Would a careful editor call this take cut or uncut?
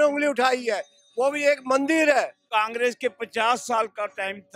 cut